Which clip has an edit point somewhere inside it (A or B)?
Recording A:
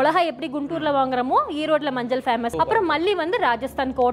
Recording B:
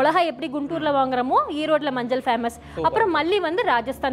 A